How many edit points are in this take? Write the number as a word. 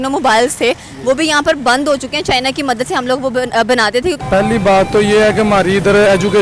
one